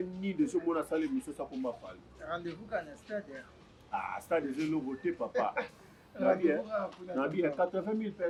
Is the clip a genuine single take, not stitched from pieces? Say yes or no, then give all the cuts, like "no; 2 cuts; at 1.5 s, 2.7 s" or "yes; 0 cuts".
yes; 0 cuts